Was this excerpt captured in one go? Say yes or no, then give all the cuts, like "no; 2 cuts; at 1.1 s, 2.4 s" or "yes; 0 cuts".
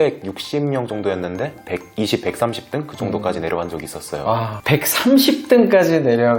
no; 1 cut; at 1.6 s